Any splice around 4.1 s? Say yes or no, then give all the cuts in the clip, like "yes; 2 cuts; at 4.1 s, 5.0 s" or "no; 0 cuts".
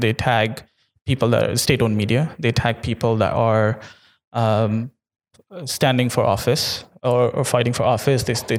no; 0 cuts